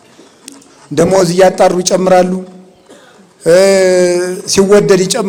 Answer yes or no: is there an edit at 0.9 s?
no